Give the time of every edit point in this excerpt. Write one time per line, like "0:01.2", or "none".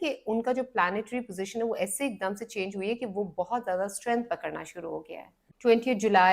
0:05.4